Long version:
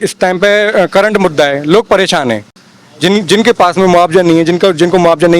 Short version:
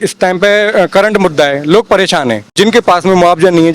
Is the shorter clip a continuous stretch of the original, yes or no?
no